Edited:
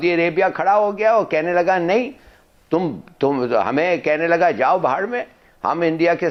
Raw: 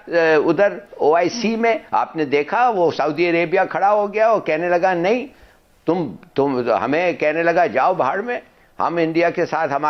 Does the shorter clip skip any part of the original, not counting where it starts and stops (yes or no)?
no